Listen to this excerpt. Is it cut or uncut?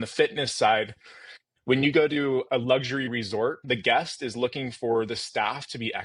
cut